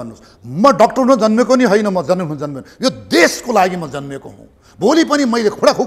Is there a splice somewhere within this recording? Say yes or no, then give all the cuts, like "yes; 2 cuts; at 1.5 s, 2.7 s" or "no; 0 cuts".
no; 0 cuts